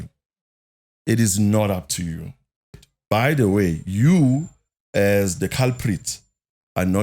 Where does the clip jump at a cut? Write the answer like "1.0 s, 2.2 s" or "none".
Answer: 2.9 s